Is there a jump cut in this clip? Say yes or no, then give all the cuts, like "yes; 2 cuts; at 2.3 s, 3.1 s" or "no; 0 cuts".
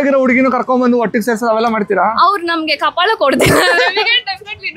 no; 0 cuts